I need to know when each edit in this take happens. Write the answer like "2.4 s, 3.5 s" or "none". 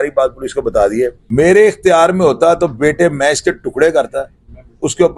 1.2 s